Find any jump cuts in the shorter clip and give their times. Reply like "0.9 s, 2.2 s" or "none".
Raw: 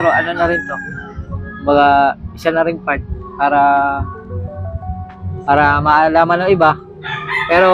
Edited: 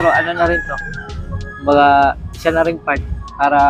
none